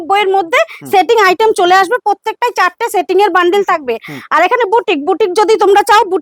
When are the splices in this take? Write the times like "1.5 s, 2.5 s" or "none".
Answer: none

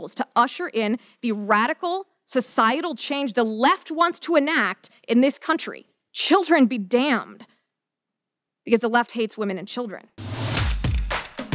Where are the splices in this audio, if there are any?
10.1 s

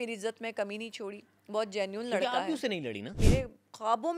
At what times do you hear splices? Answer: 3.2 s

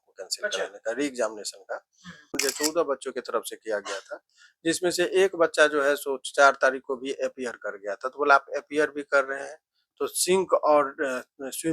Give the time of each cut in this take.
2.3 s

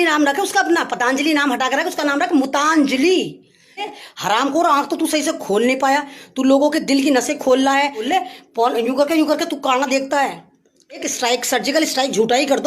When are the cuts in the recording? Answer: 3.9 s, 8.1 s, 11.1 s

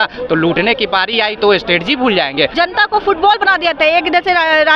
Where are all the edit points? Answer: 2.5 s

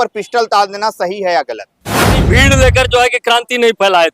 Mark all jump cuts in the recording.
2.2 s

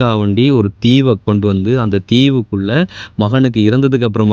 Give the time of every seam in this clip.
1.2 s

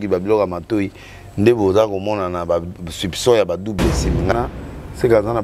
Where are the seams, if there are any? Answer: 4.3 s

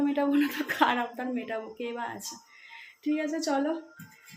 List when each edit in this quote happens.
none

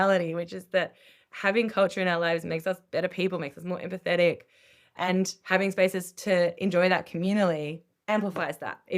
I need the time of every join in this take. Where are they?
7.9 s

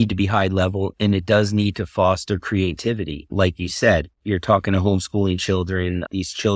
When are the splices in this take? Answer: 0.9 s, 3.3 s, 4.1 s

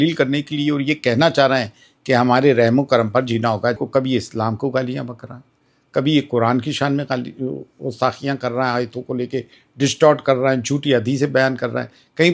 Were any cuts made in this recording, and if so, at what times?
3.8 s

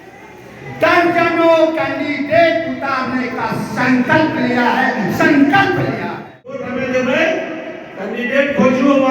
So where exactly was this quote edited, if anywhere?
6.7 s

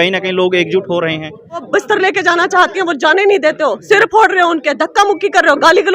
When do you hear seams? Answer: 1.7 s

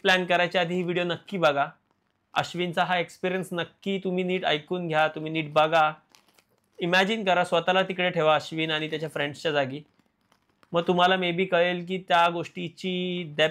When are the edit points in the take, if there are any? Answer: none

